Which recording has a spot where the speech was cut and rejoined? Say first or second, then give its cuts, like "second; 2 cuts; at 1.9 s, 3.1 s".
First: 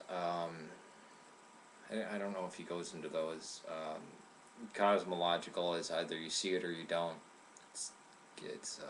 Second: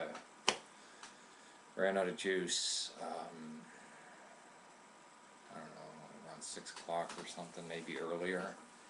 second; 1 cut; at 8.0 s